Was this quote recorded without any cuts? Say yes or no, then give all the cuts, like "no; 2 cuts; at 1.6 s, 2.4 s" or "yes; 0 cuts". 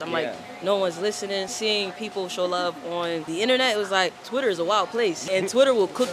no; 4 cuts; at 1.5 s, 3.3 s, 4.2 s, 5.2 s